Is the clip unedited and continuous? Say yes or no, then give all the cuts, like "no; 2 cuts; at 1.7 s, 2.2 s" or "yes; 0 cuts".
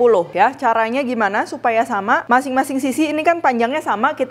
yes; 0 cuts